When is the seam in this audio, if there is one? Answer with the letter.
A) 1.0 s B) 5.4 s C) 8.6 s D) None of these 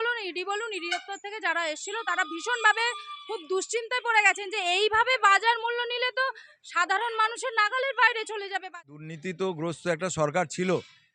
C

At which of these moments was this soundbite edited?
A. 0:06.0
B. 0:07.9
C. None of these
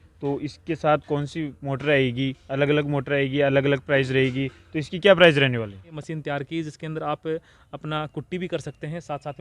A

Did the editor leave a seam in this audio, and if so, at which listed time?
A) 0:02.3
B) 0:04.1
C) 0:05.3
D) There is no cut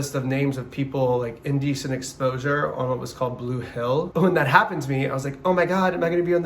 B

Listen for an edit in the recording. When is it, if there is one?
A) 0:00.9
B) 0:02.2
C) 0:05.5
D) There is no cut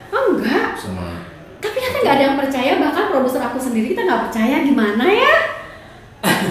D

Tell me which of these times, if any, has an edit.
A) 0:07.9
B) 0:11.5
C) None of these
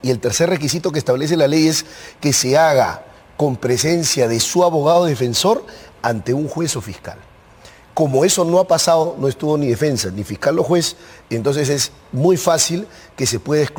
C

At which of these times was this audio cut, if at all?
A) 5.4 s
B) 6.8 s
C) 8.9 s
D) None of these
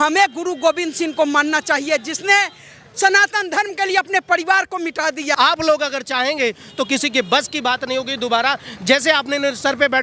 A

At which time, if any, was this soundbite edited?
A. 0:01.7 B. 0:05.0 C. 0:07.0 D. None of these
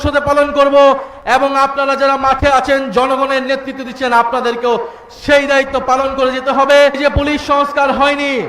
C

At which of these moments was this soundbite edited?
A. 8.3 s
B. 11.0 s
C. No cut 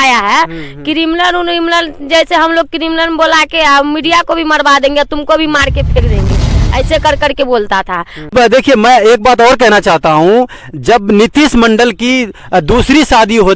A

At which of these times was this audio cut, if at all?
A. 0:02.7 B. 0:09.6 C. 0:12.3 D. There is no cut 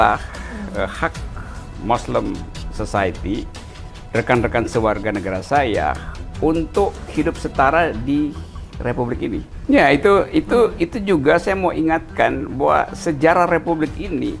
B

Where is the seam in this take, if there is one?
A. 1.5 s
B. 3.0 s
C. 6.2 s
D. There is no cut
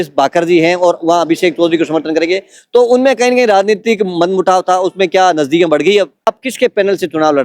C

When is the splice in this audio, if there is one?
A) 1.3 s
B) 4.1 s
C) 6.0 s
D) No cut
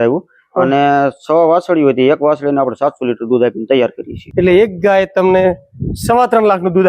B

